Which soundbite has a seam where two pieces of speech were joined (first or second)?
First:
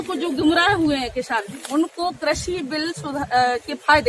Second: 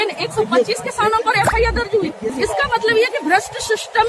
second